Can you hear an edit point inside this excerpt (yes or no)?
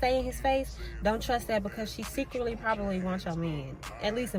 no